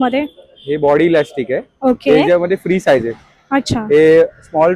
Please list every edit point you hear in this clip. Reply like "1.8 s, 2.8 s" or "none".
none